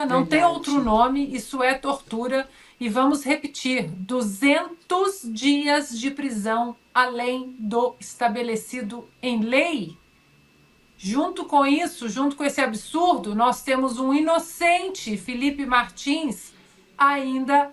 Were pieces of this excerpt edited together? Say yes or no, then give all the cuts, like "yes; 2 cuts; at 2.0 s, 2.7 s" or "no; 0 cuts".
no; 0 cuts